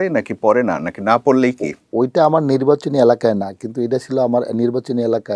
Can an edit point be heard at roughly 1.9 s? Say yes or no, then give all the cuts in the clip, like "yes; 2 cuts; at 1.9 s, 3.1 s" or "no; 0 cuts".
no; 0 cuts